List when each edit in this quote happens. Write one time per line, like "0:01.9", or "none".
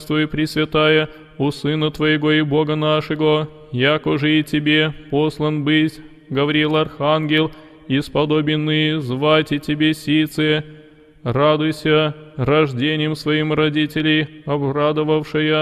none